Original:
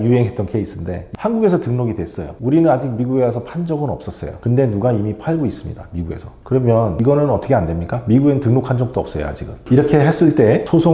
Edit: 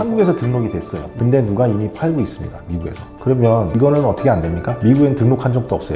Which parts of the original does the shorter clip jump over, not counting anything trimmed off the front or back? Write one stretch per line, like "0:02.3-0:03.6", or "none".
0:02.2-0:04.2

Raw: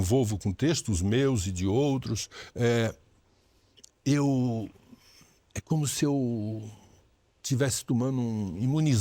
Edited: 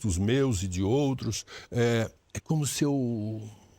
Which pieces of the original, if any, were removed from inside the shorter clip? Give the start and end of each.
0:03.1-0:05.5

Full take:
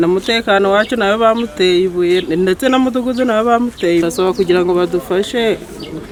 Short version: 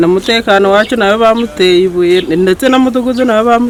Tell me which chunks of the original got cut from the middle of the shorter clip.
none

